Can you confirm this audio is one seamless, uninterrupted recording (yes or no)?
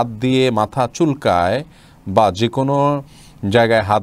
yes